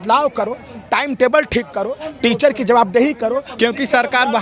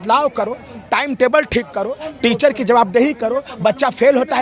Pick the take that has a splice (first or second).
first